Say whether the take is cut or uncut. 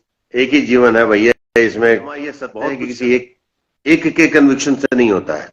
cut